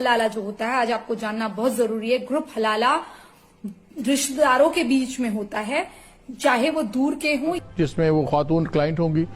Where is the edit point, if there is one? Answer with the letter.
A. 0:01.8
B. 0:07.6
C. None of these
B